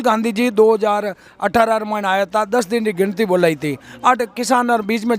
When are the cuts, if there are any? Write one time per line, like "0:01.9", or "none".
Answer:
none